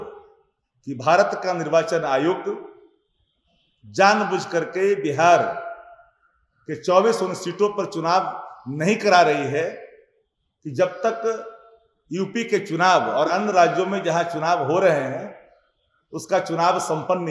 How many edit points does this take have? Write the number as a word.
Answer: zero